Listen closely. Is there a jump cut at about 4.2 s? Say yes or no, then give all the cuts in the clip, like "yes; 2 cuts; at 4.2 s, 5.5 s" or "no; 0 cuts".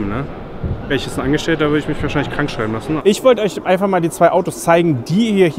no; 2 cuts; at 0.9 s, 3.0 s